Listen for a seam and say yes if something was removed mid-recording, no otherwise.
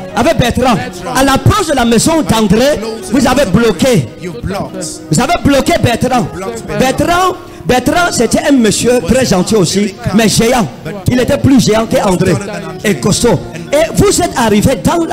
no